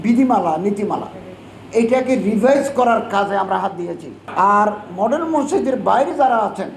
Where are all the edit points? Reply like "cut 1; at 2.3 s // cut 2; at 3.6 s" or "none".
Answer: cut 1; at 4.2 s